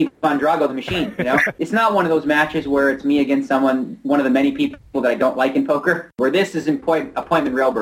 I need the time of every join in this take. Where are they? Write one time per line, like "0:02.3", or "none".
0:01.5
0:06.1